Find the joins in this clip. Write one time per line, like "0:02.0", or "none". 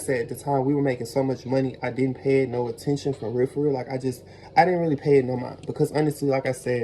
none